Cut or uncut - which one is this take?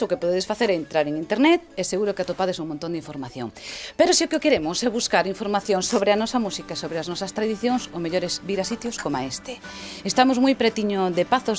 cut